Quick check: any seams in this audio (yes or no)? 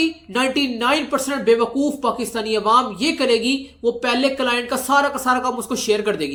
no